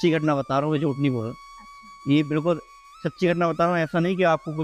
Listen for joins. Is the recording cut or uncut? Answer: uncut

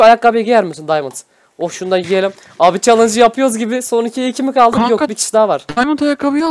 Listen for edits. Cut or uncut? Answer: uncut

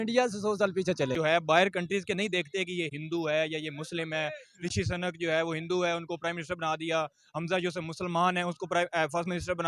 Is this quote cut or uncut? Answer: cut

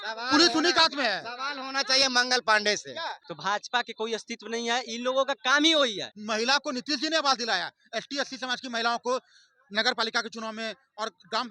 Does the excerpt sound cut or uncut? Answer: cut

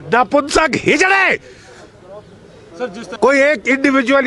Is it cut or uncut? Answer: cut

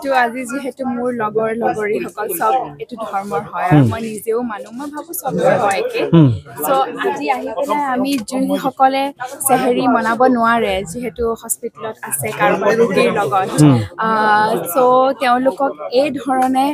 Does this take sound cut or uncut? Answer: uncut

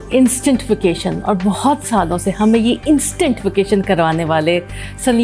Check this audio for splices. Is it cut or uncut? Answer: uncut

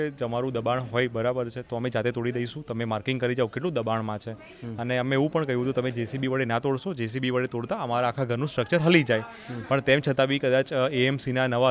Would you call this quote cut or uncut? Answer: uncut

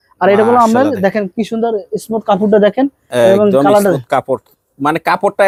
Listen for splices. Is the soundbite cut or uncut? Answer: uncut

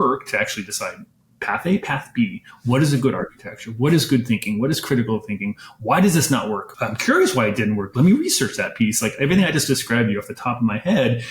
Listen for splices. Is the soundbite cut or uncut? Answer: cut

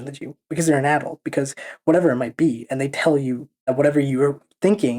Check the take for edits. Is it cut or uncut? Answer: cut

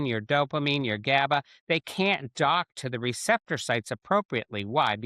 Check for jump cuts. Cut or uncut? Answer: uncut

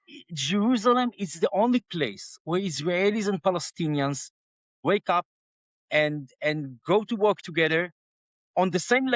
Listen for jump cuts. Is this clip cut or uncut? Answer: cut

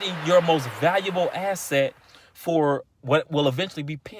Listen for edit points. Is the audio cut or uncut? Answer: uncut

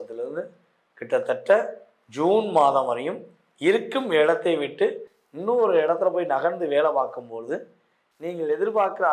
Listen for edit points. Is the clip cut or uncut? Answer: uncut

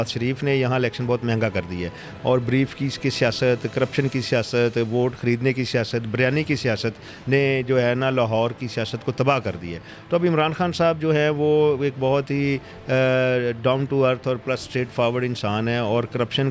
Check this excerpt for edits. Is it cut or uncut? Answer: uncut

